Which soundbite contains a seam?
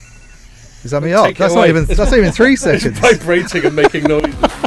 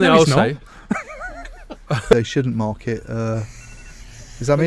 second; 1 cut; at 2.1 s

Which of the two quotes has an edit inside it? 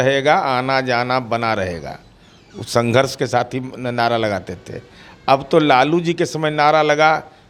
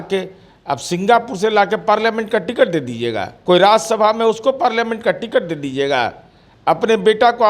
second; 1 cut; at 3.3 s

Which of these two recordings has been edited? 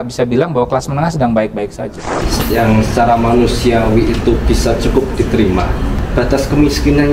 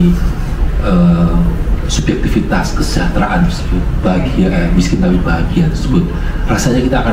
first; 2 cuts; at 2.2 s, 6.0 s

